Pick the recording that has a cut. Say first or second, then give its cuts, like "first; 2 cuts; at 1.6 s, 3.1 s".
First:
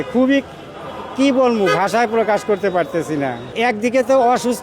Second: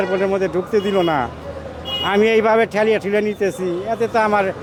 first; 1 cut; at 3.5 s